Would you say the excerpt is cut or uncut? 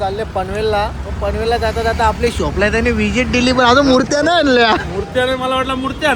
uncut